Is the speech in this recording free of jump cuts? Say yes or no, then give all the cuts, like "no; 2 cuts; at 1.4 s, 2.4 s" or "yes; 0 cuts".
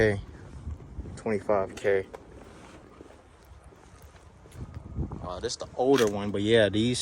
yes; 0 cuts